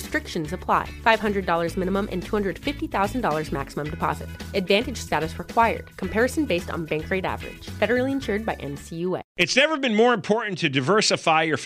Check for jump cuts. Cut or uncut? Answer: cut